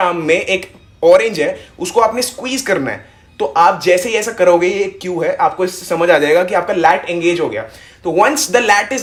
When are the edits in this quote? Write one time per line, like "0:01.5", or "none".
none